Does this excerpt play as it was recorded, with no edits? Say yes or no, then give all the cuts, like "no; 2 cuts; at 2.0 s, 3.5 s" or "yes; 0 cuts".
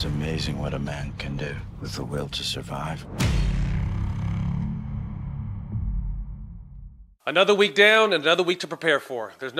no; 1 cut; at 7.0 s